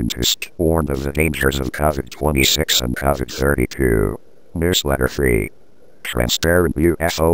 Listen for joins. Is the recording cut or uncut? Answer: cut